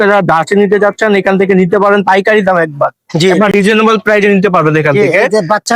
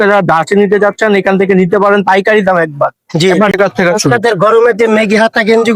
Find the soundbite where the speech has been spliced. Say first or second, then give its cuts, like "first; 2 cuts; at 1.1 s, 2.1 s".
second; 1 cut; at 3.5 s